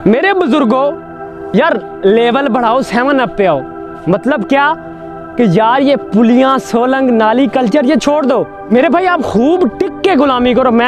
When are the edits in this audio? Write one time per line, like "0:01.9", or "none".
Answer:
0:08.6